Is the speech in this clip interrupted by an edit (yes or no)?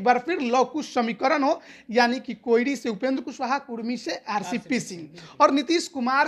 no